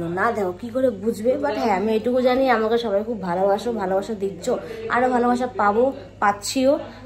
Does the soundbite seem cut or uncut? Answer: uncut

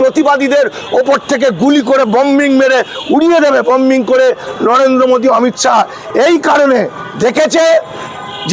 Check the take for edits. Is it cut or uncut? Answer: cut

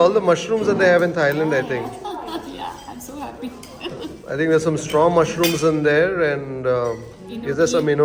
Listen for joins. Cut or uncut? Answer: uncut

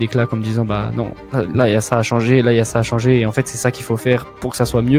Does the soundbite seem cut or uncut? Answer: uncut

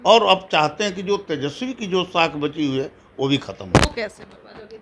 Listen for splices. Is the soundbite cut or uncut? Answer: uncut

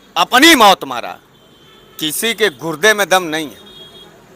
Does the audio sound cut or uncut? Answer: uncut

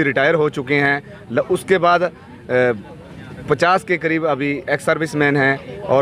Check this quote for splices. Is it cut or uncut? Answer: uncut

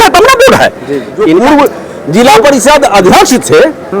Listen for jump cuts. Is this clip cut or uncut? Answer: cut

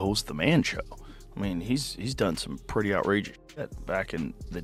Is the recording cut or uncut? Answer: uncut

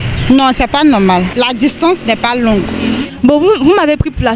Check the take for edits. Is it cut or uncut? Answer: cut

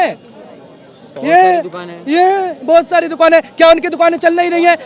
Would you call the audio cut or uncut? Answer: uncut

